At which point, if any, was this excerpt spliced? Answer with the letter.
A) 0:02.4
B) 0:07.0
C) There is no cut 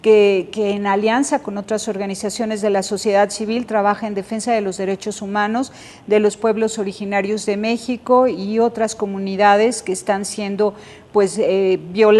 B